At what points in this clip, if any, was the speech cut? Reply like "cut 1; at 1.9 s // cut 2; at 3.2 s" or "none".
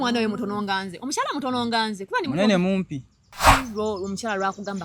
cut 1; at 3.5 s

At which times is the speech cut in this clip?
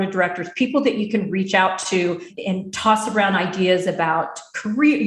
cut 1; at 2.3 s

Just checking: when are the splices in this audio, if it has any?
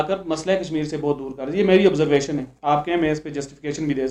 none

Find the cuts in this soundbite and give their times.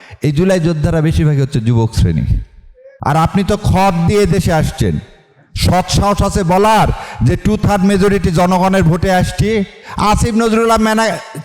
cut 1; at 2.9 s

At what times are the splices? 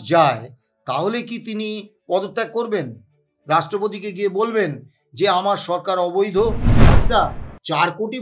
cut 1; at 7.0 s

